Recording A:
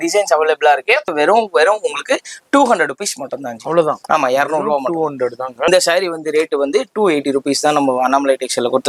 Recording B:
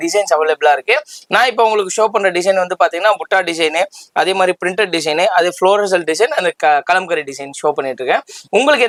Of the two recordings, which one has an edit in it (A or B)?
A